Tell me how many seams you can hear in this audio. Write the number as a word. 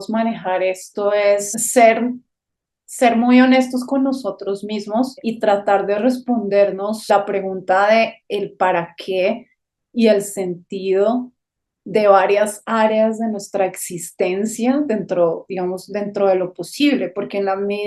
three